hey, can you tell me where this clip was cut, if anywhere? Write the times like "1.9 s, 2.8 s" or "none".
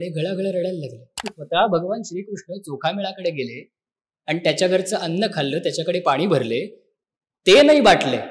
1.3 s